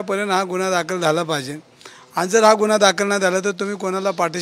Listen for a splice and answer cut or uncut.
uncut